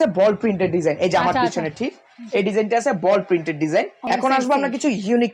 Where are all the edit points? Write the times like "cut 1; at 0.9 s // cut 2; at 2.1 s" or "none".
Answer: cut 1; at 4.0 s